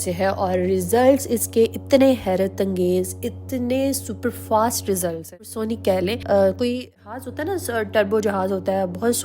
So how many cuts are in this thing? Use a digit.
2